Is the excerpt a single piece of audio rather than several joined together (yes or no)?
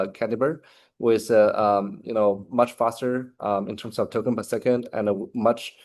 yes